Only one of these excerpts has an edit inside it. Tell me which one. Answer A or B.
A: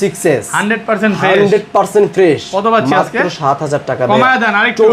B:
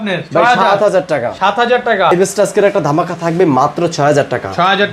B